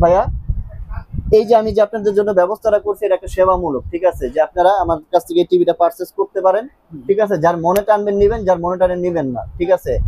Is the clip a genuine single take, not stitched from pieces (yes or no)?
yes